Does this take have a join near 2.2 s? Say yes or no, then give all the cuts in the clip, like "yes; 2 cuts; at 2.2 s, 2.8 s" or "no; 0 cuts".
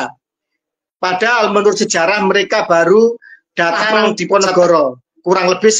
no; 1 cut; at 4.2 s